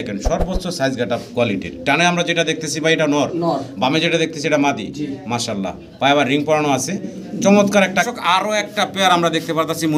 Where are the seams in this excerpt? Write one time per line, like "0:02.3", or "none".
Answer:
0:08.1